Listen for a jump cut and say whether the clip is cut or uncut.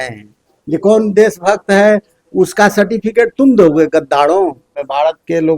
cut